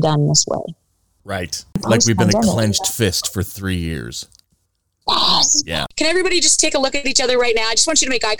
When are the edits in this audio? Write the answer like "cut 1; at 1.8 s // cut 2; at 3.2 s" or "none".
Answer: cut 1; at 1.8 s // cut 2; at 5.8 s